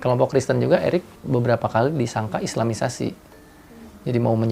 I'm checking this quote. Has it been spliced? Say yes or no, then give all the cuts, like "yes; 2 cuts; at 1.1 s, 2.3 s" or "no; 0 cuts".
yes; 1 cut; at 1.2 s